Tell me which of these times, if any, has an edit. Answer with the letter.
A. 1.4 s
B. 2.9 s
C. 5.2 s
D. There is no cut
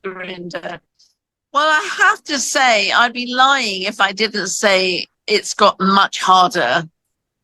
A